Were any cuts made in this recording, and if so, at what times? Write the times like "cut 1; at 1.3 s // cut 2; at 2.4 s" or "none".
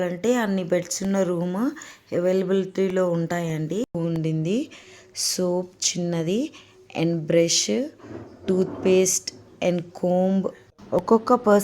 cut 1; at 4.0 s